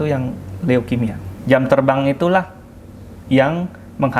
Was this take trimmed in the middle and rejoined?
yes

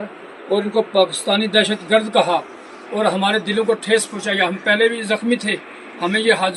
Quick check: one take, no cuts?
yes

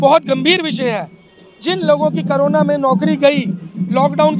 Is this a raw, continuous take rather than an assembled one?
yes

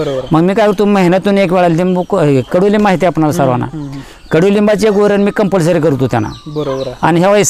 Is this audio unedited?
yes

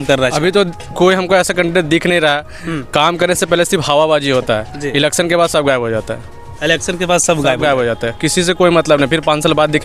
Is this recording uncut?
yes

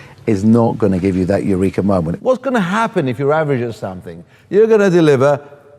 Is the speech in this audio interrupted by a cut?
yes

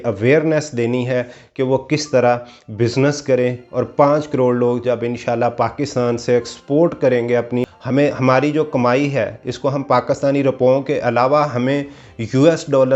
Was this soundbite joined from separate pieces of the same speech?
yes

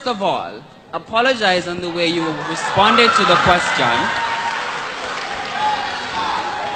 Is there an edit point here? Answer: no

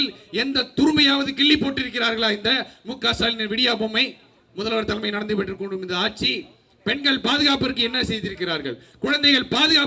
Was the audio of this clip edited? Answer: no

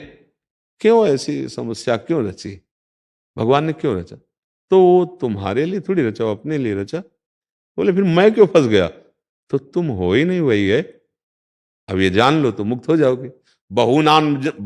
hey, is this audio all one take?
yes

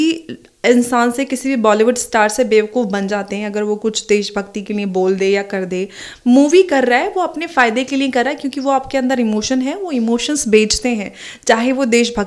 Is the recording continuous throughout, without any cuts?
yes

